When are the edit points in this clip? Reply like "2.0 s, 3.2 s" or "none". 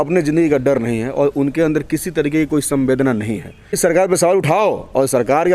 3.8 s